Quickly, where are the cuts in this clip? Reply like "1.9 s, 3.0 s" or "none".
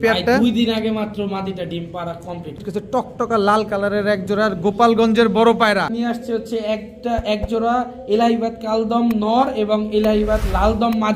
2.6 s, 5.9 s